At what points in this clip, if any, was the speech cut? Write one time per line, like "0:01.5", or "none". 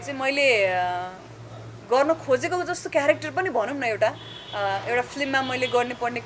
none